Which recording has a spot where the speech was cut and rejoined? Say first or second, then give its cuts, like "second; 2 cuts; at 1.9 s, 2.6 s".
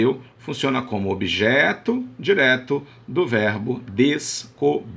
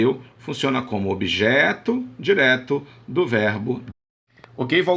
first; 1 cut; at 3.9 s